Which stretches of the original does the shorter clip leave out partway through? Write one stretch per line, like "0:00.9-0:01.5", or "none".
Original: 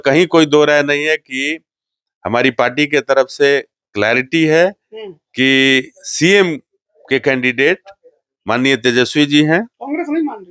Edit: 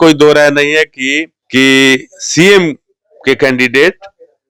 0:01.6-0:05.2

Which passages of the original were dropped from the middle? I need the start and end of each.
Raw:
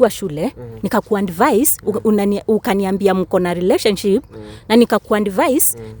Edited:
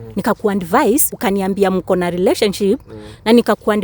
0:01.8-0:02.6

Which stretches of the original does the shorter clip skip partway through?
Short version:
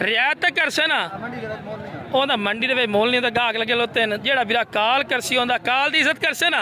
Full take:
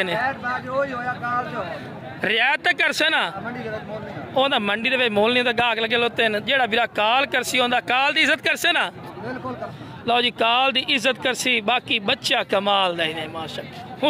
none

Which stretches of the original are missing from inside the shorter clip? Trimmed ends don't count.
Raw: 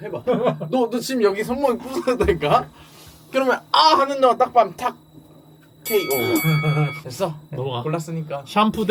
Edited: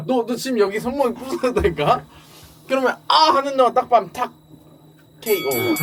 none

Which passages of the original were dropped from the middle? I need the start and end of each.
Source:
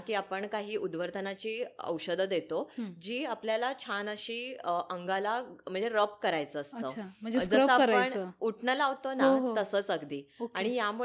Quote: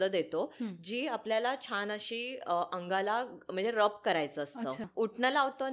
0:07.0-0:08.3

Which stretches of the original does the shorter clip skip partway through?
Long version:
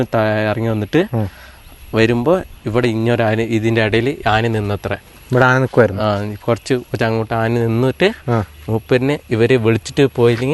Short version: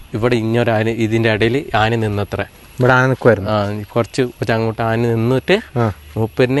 none

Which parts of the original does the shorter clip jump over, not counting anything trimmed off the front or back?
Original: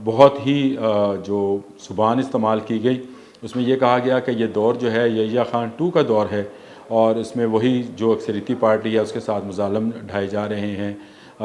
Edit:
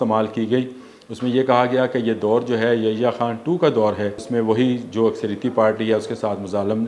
0:06.6-0:07.3

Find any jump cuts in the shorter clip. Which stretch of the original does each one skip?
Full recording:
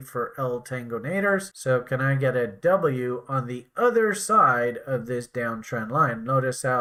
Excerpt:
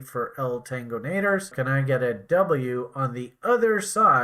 0:01.5-0:01.9

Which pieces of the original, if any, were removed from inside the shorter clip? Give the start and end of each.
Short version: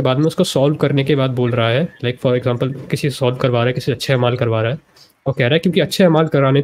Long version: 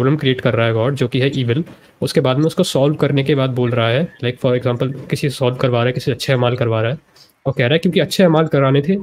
none

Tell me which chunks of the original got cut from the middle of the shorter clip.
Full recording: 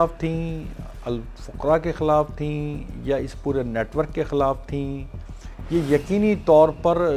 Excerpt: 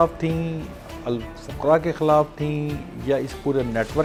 none

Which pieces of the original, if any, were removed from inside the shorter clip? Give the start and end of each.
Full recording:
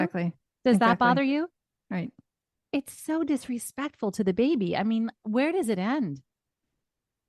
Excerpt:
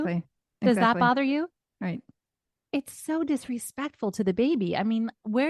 none

